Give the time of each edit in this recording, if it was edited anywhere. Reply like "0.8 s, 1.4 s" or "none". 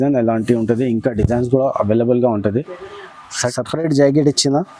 3.5 s